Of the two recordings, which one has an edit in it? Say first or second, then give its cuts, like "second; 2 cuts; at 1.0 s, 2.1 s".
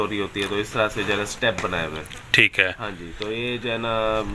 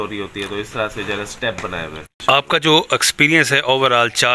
second; 1 cut; at 2.1 s